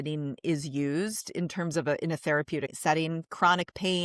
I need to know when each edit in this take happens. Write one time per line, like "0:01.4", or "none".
0:02.7